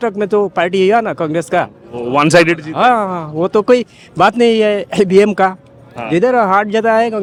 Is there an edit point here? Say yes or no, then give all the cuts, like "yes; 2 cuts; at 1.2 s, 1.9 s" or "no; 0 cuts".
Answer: no; 0 cuts